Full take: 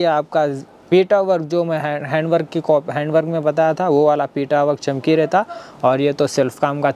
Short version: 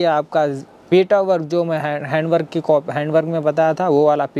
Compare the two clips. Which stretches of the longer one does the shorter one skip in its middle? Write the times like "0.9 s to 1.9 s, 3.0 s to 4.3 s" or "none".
none